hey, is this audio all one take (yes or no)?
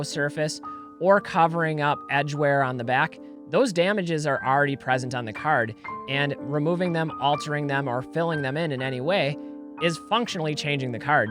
no